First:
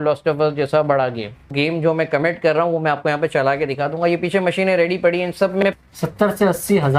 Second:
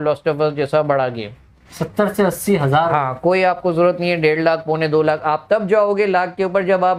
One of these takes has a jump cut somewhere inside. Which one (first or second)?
first